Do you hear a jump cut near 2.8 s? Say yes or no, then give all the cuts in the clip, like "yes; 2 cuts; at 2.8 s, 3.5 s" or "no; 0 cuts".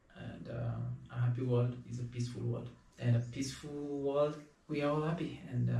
yes; 2 cuts; at 2.8 s, 4.5 s